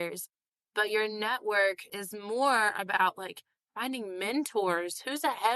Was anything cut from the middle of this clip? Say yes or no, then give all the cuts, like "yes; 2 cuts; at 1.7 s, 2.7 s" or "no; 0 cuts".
yes; 1 cut; at 2.0 s